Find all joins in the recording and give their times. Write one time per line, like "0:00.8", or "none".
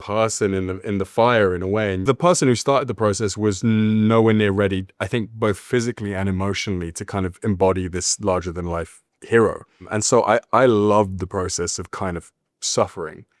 0:02.0